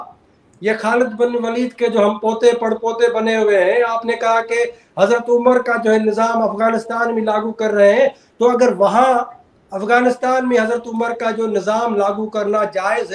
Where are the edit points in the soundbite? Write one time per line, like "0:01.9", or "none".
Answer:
none